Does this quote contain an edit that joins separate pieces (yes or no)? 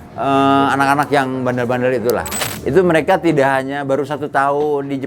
yes